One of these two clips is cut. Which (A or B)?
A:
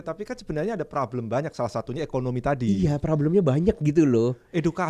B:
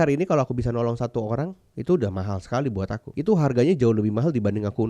B